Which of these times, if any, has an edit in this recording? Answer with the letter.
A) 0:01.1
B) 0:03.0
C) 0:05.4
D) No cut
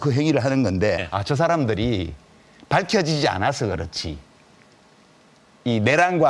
A